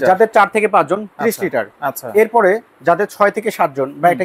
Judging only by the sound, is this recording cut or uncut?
uncut